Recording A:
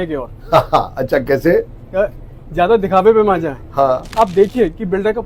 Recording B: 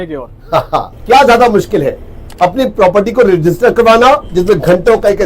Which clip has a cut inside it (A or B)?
B